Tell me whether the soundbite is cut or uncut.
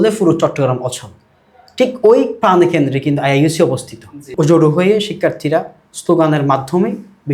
uncut